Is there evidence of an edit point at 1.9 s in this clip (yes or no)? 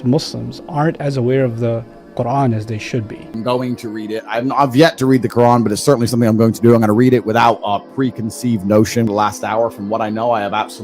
no